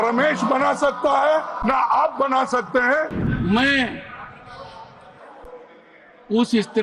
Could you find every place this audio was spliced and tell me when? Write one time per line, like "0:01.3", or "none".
0:03.2